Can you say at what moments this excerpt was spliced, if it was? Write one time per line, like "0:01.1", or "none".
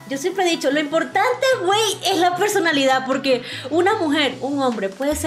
none